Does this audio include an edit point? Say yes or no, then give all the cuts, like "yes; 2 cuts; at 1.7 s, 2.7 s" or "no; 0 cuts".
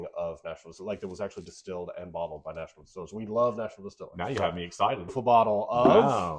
yes; 1 cut; at 5.1 s